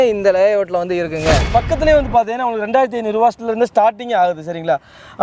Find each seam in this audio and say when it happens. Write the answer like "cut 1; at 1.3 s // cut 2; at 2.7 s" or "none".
cut 1; at 1.4 s